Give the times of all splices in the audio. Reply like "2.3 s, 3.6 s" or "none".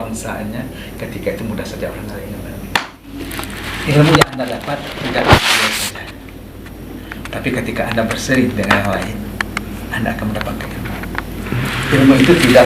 3.1 s

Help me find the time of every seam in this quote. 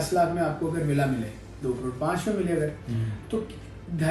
none

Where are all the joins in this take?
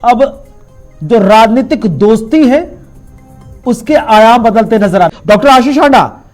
5.2 s

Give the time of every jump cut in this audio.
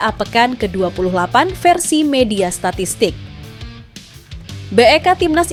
none

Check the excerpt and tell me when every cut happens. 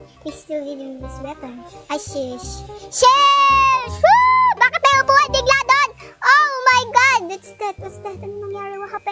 none

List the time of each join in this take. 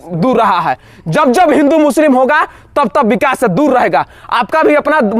none

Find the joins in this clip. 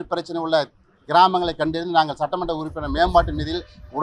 none

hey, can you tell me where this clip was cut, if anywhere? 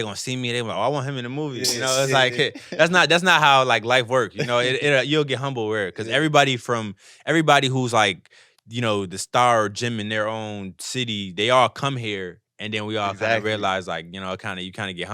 none

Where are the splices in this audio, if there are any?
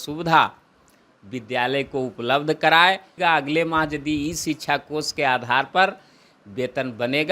3.2 s

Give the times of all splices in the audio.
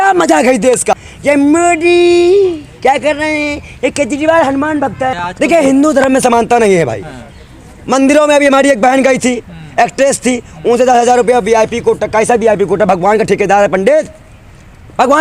1.1 s, 5.2 s

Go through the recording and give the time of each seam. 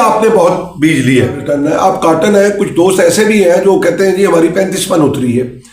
1.4 s

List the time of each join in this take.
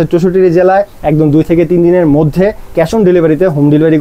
none

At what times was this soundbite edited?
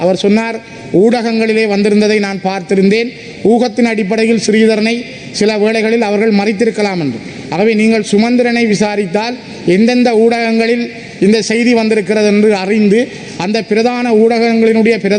none

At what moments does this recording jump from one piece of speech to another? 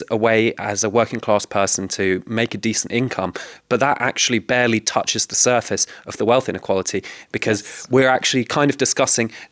none

